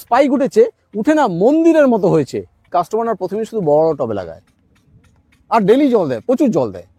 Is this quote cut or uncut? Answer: cut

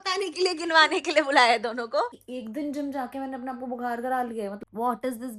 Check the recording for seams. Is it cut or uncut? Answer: cut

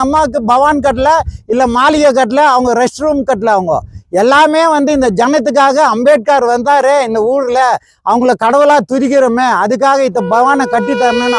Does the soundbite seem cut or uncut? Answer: uncut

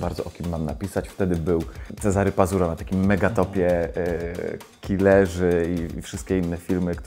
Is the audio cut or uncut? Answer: cut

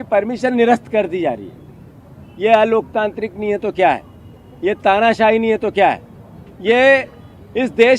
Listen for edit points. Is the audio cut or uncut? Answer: uncut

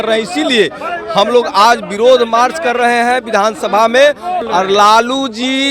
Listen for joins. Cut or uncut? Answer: cut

